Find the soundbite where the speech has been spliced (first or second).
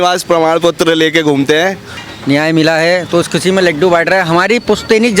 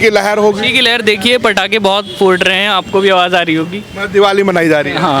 first